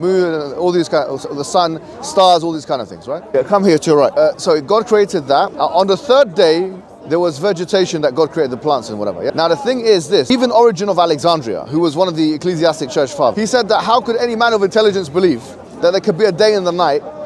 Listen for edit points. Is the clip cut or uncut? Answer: cut